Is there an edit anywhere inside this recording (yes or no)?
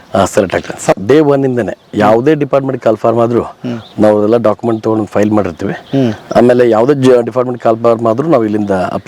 yes